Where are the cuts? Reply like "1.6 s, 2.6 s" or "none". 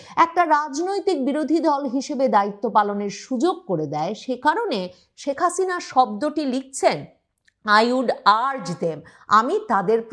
none